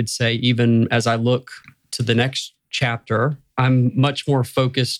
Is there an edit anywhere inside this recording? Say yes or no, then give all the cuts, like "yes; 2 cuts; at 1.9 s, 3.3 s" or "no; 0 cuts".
yes; 1 cut; at 3.4 s